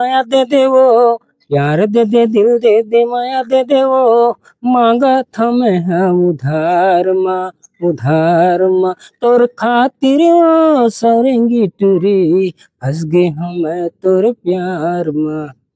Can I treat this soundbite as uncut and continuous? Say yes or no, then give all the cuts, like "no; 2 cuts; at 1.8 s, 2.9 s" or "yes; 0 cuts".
yes; 0 cuts